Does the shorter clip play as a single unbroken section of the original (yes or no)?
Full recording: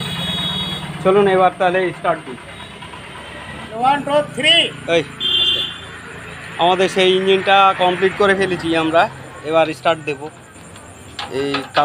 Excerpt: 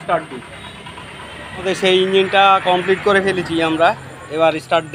no